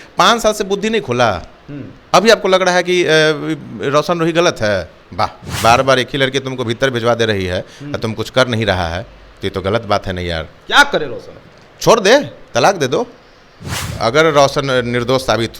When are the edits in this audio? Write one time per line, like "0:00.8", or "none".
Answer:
0:05.4
0:13.7